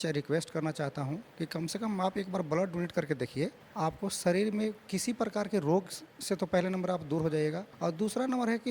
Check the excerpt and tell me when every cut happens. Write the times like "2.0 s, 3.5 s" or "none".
3.6 s, 7.7 s